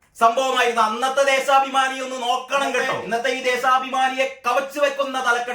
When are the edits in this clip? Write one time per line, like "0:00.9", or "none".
0:03.0